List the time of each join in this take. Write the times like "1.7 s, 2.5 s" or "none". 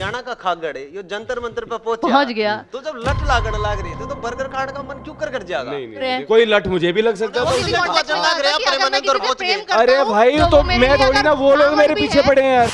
6.1 s, 7.6 s